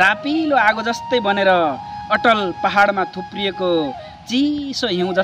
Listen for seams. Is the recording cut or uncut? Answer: uncut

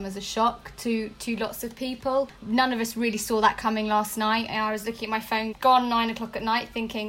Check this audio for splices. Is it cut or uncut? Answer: cut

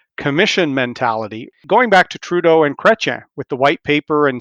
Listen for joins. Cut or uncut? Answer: cut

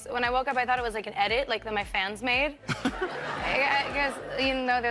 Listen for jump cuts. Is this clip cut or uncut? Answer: uncut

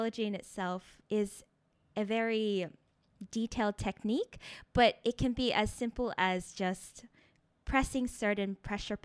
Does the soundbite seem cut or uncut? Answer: cut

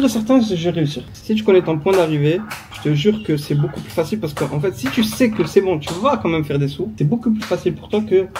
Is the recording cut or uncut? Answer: cut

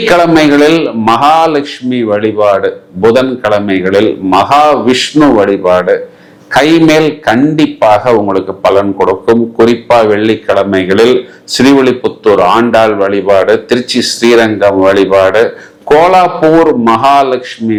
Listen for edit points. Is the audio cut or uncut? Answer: uncut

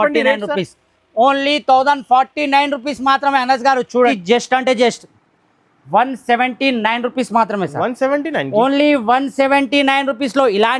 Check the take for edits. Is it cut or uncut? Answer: cut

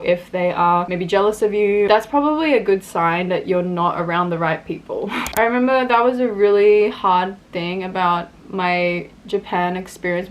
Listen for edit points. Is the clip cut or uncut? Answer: uncut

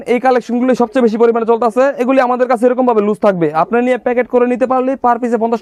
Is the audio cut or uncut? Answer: uncut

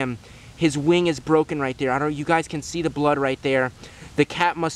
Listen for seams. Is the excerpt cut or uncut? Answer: uncut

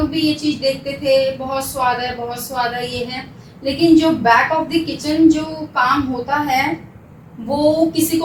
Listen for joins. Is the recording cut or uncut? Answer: uncut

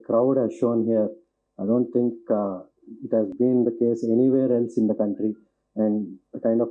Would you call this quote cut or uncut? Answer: uncut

